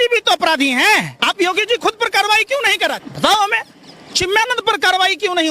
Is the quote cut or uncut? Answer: cut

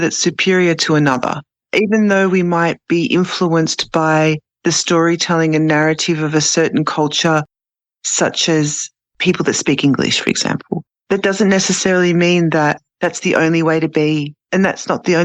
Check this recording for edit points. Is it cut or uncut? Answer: uncut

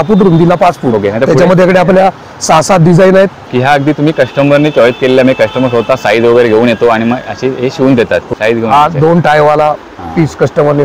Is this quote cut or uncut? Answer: cut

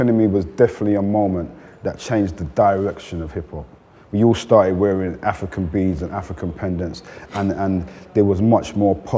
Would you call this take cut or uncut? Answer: uncut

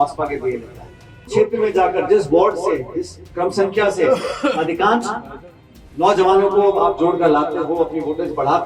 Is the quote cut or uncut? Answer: cut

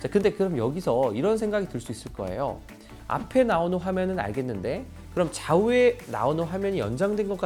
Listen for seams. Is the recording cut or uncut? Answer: uncut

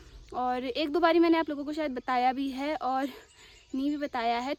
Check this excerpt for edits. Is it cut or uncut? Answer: uncut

